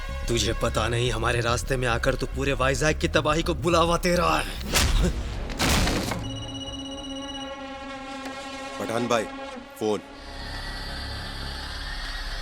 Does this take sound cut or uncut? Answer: uncut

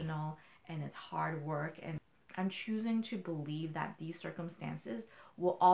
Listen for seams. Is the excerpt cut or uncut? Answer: cut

